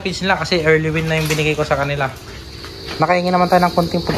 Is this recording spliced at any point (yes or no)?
yes